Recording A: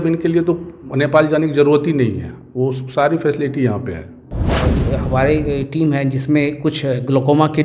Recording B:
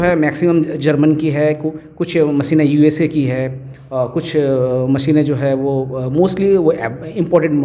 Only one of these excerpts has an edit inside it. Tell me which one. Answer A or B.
A